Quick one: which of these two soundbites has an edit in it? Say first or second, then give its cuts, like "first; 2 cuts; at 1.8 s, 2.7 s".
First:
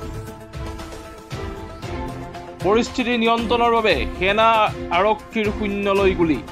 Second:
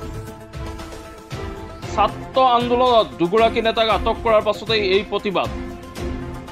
second; 2 cuts; at 2.0 s, 5.5 s